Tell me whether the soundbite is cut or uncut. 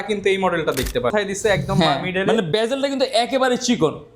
cut